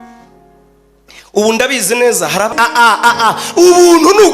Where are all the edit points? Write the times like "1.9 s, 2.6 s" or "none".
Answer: 2.5 s